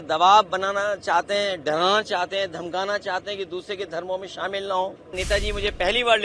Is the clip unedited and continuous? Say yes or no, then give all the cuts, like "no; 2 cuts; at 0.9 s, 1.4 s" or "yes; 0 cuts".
no; 1 cut; at 5.2 s